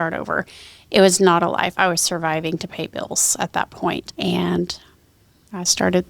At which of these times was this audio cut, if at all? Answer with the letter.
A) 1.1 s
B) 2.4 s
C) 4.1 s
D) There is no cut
C